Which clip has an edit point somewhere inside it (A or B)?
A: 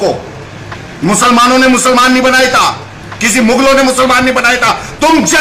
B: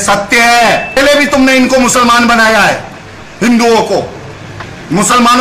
B